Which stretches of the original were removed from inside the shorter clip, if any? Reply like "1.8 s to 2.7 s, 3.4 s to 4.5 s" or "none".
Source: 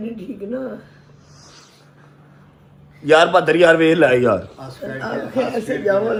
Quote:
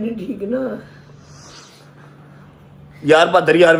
none